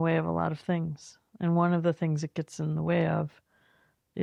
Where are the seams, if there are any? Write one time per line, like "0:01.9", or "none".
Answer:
none